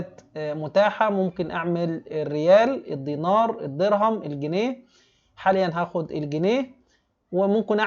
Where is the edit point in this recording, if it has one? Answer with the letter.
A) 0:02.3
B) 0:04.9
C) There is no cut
C